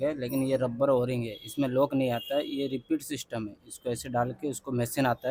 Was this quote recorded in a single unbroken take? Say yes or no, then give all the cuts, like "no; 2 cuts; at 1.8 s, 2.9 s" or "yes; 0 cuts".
yes; 0 cuts